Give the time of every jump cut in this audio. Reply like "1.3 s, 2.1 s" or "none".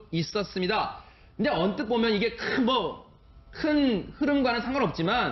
none